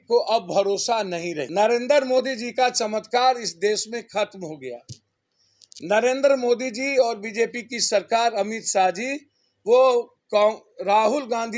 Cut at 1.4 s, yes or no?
yes